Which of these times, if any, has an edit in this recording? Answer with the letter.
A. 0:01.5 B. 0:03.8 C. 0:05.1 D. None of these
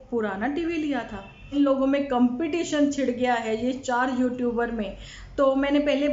A